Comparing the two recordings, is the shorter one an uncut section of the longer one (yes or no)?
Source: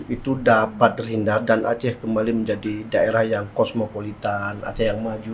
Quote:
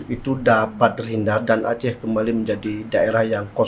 yes